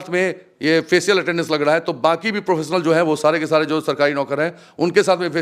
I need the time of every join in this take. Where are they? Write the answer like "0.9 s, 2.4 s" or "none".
none